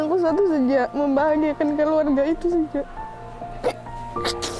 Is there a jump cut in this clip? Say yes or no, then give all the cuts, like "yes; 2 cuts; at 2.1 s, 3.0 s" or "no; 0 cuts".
no; 0 cuts